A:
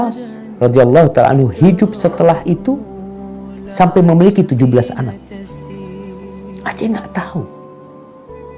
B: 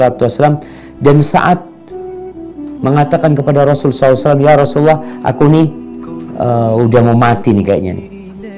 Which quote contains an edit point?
A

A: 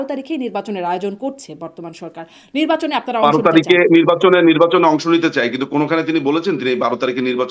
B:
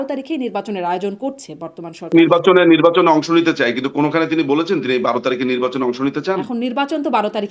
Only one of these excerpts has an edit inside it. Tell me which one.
B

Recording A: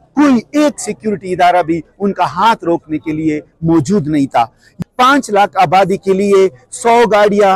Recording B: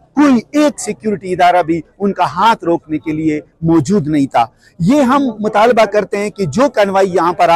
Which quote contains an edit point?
A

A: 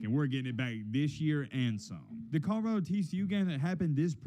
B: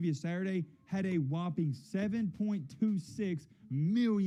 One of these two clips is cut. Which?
A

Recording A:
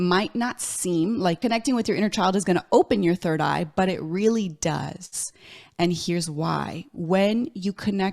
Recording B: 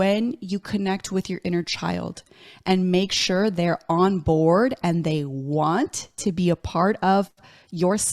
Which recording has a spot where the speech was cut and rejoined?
A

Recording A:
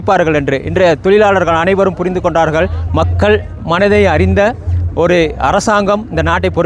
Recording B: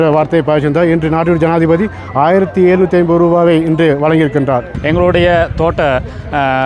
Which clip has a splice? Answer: B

